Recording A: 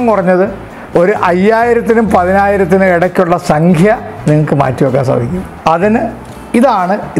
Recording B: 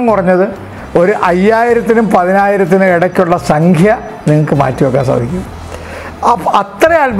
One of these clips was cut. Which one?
A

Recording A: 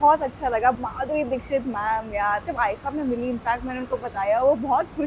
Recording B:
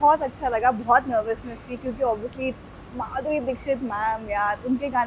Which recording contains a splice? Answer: A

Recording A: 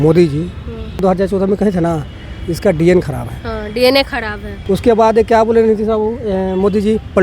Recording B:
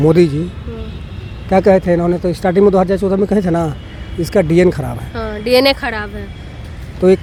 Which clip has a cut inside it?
A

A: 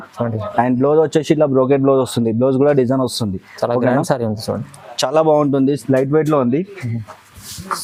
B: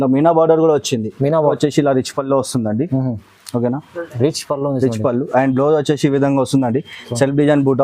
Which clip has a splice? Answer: B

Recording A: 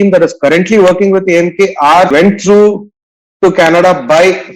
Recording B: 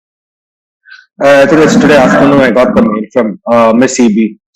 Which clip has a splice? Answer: A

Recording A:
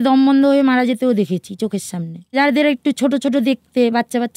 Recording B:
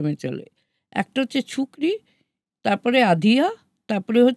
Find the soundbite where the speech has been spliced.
A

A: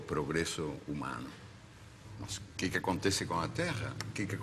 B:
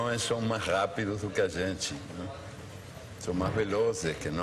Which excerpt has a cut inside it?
A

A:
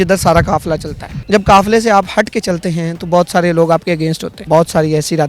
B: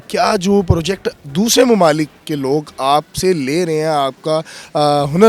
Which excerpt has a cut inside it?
A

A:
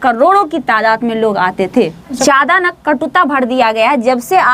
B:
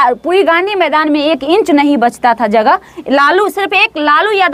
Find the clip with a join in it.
A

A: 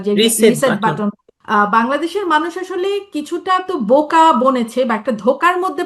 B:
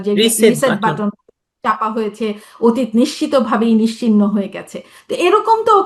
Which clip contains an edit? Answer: A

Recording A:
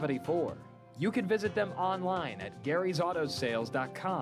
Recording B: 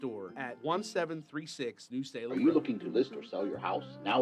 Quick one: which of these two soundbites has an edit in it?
B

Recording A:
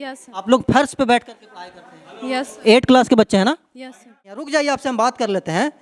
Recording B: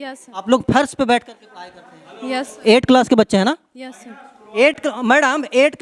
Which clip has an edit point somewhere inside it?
A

